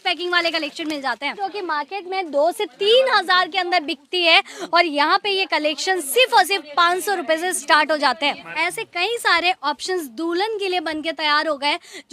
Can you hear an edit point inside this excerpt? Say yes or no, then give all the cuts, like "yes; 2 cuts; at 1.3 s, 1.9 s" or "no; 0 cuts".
yes; 2 cuts; at 1.4 s, 8.5 s